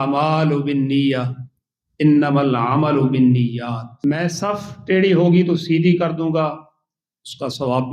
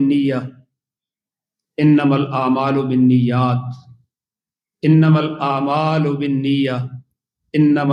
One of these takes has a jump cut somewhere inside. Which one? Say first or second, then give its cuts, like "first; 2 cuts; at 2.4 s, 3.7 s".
first; 1 cut; at 3.9 s